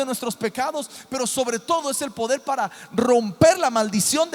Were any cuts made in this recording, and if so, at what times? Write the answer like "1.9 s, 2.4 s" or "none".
none